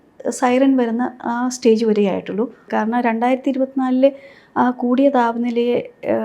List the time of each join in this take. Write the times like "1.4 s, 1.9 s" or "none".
2.6 s

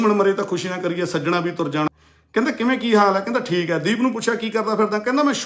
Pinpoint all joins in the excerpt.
1.9 s

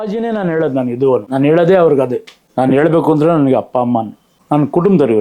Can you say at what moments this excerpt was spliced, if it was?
1.3 s, 2.4 s, 4.3 s

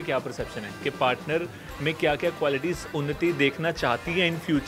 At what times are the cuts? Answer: none

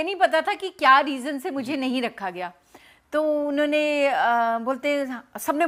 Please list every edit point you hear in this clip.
none

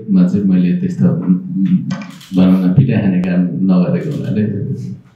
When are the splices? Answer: none

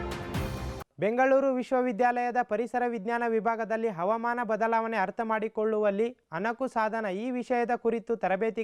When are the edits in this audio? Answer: none

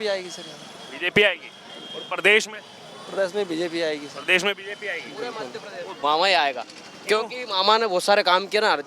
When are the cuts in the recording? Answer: 6.0 s

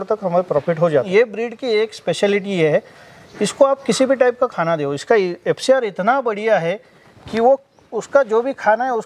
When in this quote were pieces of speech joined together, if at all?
1.1 s

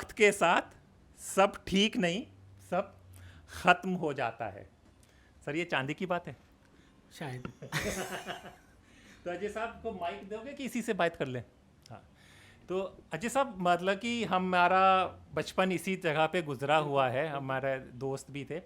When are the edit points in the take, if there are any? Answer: none

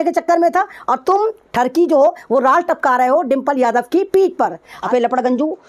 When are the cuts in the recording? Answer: 4.7 s

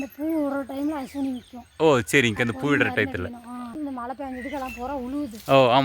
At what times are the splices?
3.8 s

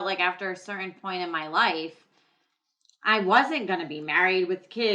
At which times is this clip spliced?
none

